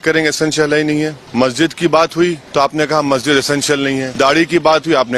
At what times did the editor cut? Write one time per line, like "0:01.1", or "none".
0:01.2
0:02.4
0:04.1